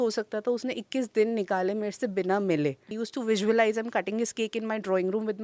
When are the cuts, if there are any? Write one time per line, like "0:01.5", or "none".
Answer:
0:03.0